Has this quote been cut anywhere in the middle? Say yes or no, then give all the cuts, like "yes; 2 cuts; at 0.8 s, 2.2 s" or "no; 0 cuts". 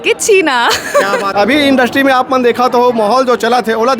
yes; 1 cut; at 1.3 s